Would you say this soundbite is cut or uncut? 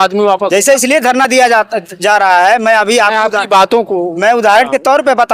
uncut